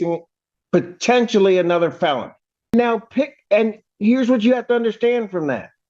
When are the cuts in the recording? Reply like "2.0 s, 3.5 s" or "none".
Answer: 2.7 s